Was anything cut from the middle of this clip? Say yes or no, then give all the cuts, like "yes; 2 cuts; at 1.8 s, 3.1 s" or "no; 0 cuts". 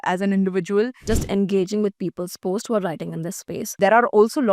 yes; 2 cuts; at 1.0 s, 3.7 s